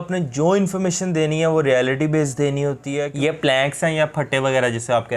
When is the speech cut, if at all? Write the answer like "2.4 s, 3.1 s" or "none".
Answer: 3.1 s